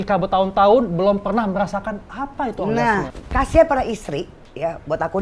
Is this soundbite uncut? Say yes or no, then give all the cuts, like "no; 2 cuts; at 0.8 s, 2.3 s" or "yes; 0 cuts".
no; 1 cut; at 3.1 s